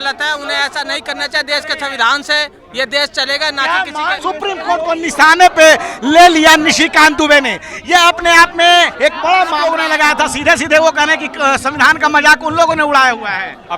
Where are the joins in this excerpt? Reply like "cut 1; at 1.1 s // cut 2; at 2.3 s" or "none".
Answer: cut 1; at 4.2 s // cut 2; at 9.8 s